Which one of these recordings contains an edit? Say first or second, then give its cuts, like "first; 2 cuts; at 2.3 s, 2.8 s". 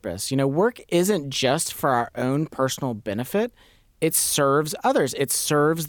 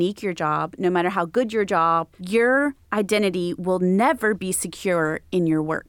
second; 1 cut; at 2.1 s